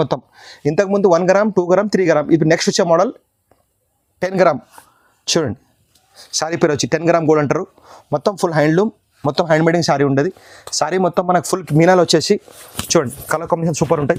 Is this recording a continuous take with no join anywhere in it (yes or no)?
yes